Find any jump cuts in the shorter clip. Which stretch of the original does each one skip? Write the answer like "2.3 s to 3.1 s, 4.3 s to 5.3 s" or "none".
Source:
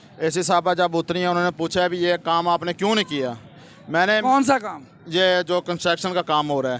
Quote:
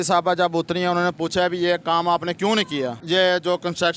3.4 s to 5.0 s

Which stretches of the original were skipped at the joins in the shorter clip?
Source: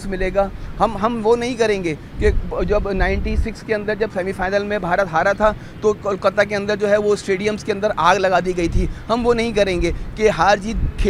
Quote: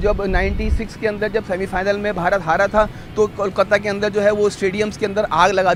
none

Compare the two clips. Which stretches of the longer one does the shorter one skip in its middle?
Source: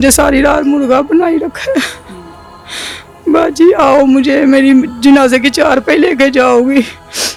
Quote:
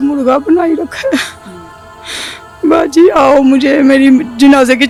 none

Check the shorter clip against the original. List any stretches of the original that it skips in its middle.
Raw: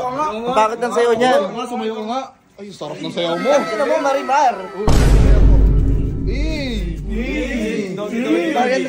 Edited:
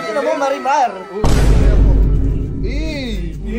none

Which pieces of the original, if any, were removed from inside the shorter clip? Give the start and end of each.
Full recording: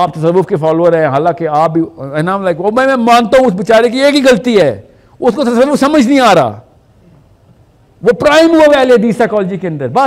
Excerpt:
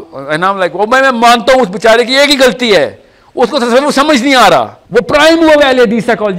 6.6 s to 7.9 s

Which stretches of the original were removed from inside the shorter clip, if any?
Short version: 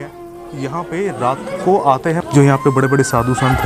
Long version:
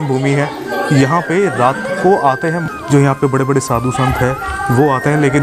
2.6 s to 2.8 s

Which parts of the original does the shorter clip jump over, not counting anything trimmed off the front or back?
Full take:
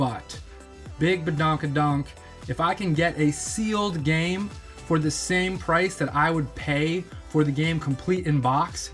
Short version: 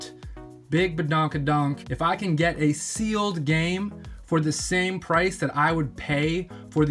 2.1 s to 2.4 s

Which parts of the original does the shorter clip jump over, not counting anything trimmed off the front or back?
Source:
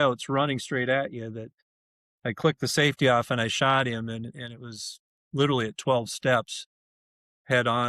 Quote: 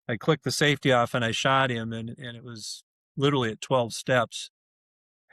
none

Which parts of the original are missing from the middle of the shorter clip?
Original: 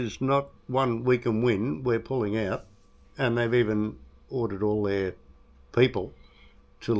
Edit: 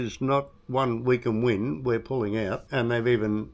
2.6 s to 3.1 s

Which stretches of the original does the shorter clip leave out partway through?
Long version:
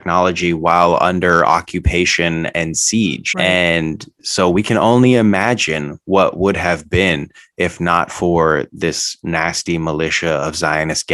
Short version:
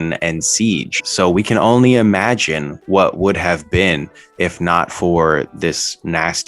3.2 s to 4.1 s

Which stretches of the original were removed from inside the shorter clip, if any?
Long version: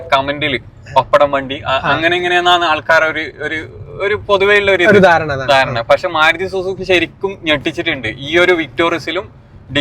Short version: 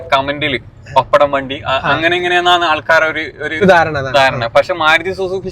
3.6 s to 5.0 s

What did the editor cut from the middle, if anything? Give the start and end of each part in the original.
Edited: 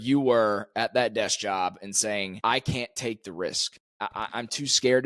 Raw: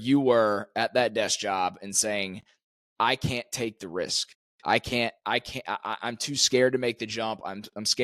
2.3 s to 2.9 s, 4.5 s to 5.6 s

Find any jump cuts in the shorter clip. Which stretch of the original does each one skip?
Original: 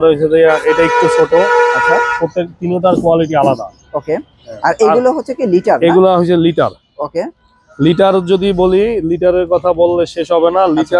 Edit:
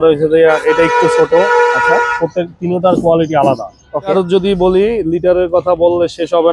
4.1 s to 8.1 s

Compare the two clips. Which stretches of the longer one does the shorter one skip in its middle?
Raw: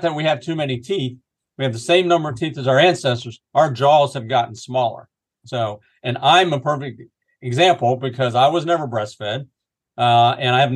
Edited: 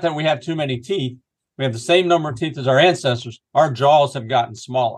none

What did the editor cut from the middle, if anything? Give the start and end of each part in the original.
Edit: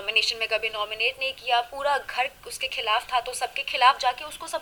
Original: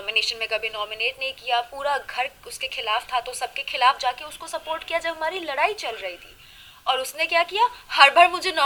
none

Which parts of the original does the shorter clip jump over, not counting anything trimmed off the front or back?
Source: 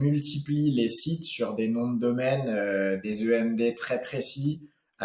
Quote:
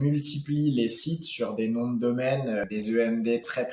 2.7 s to 3.0 s

